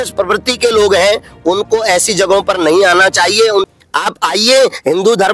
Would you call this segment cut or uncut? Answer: cut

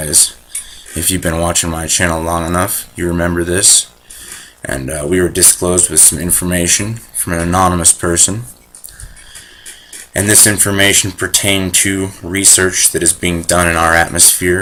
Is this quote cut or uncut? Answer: uncut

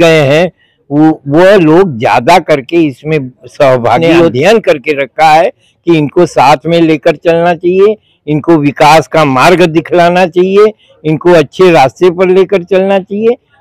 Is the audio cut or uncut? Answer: cut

